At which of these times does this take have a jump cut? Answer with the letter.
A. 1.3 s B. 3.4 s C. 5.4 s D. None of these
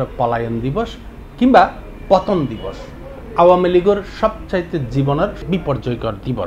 C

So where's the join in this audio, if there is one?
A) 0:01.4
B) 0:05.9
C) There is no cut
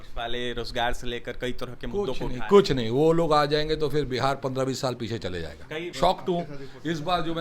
B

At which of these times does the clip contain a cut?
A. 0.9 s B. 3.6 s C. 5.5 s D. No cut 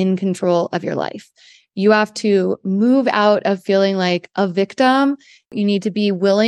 C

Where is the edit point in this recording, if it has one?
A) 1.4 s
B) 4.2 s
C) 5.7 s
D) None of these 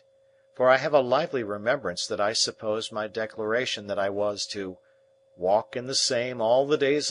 B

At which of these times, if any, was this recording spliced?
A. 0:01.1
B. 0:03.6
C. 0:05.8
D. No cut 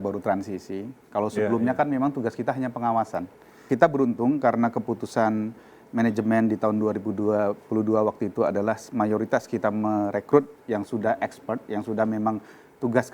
B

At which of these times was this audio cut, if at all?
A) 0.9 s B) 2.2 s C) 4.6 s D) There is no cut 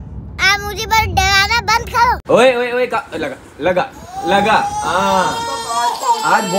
B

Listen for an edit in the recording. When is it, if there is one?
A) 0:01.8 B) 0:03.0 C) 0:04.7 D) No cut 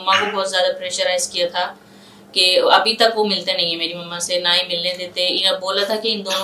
D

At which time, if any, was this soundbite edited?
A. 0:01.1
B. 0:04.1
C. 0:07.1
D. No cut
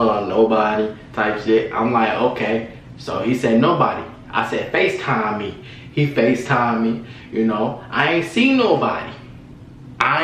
D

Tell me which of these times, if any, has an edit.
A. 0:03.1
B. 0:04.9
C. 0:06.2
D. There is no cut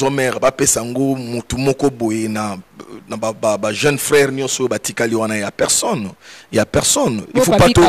D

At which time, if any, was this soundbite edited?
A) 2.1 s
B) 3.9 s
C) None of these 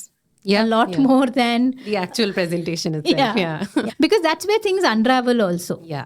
B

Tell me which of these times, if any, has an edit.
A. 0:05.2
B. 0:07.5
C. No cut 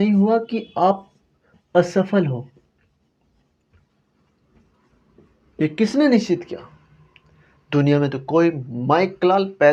C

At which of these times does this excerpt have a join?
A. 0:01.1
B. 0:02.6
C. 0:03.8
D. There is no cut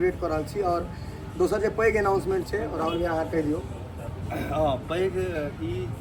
D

